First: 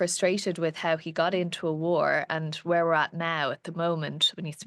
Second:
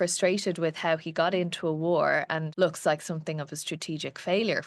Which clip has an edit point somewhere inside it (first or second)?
second